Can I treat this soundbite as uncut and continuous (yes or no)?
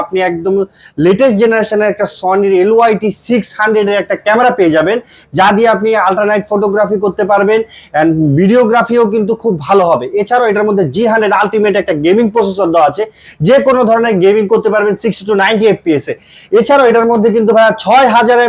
yes